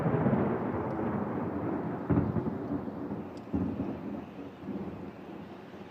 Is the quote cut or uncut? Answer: cut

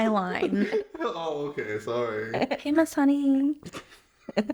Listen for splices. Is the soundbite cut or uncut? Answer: uncut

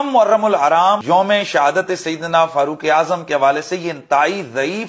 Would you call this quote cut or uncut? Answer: cut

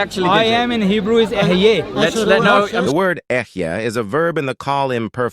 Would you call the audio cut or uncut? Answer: cut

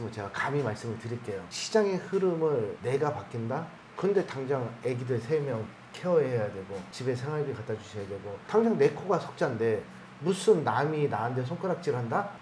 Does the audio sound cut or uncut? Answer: uncut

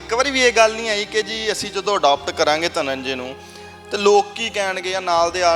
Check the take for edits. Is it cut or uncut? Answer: uncut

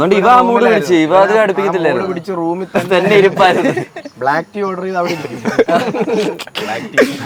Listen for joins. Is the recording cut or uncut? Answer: uncut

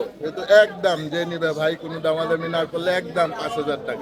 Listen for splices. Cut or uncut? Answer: uncut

